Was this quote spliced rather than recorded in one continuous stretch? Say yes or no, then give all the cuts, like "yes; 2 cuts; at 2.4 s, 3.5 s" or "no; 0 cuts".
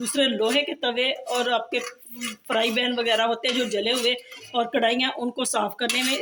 no; 0 cuts